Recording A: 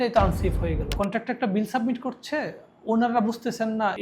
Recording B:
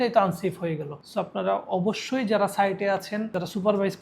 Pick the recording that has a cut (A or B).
A